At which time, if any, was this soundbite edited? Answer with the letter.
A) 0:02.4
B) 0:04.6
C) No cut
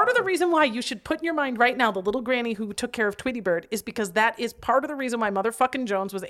C